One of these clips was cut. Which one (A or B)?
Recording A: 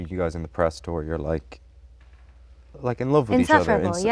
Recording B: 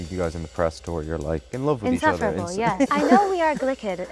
B